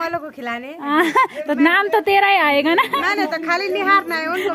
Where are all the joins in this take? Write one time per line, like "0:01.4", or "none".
none